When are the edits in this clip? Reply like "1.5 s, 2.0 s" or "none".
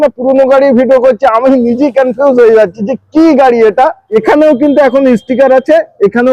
4.0 s